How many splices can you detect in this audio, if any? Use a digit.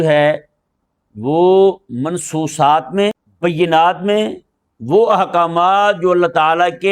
1